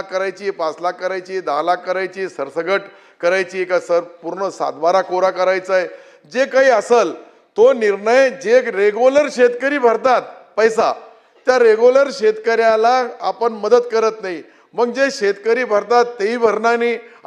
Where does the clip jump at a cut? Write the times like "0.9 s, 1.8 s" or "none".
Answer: none

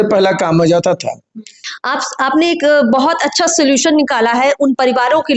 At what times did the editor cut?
1.6 s

